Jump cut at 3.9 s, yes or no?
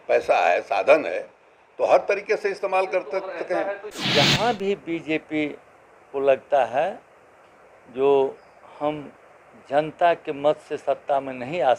yes